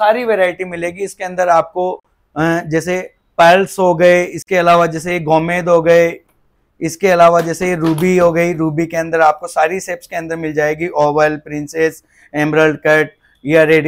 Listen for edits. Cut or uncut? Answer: uncut